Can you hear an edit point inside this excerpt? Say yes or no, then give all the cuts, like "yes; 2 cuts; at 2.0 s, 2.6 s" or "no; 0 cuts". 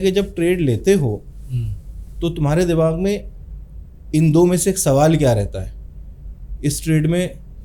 no; 0 cuts